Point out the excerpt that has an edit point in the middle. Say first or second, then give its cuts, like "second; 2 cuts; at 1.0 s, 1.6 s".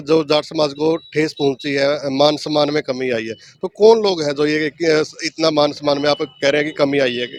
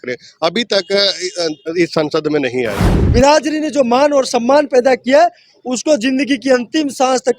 second; 1 cut; at 3.0 s